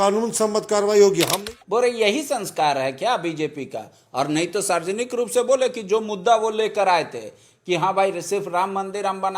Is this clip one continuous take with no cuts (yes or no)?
no